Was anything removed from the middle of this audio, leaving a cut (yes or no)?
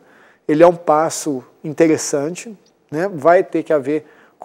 no